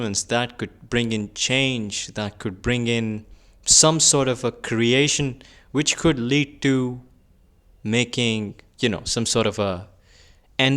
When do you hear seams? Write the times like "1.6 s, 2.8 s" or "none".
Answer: none